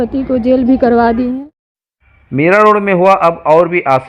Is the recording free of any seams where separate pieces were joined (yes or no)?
no